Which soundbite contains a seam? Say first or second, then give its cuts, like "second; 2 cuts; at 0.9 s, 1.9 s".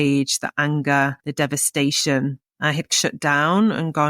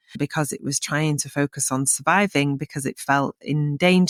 first; 2 cuts; at 1.2 s, 2.9 s